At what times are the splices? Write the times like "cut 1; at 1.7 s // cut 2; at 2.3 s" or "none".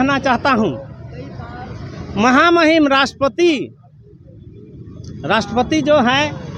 none